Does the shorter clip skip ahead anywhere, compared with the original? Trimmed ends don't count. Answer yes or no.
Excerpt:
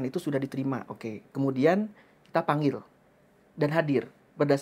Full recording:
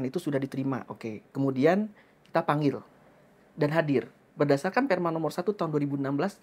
no